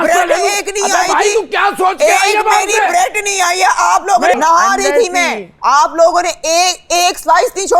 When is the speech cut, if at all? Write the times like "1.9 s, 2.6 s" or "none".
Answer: 4.4 s